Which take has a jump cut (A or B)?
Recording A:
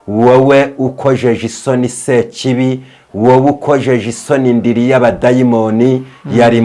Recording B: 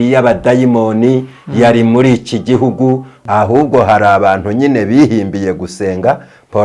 B